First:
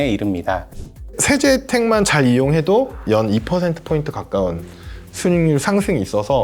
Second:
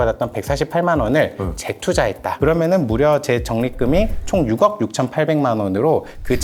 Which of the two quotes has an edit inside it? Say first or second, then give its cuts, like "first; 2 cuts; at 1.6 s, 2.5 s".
first; 2 cuts; at 1.2 s, 3.0 s